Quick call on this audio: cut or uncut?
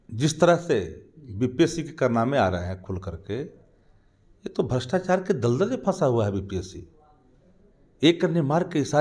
uncut